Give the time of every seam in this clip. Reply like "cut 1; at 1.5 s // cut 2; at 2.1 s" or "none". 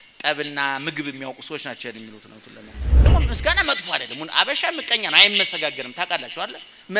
cut 1; at 3.1 s